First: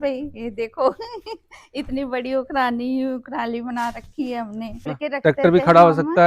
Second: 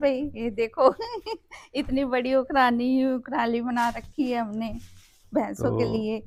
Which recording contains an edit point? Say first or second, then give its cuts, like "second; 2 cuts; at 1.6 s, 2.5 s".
first; 1 cut; at 4.9 s